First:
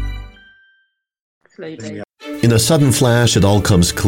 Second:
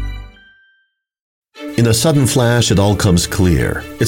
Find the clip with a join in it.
second; 1 cut; at 1.5 s

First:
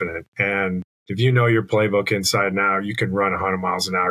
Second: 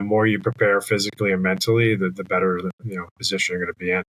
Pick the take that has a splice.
first; 1 cut; at 1.0 s

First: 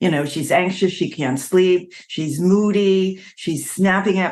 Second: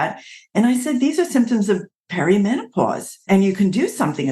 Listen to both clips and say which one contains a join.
second; 1 cut; at 3.3 s

